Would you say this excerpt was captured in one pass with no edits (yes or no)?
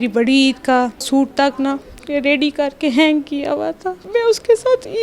no